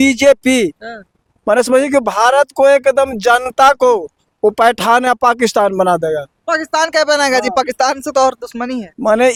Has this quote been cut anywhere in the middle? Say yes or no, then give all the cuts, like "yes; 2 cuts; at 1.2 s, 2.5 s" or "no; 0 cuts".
no; 0 cuts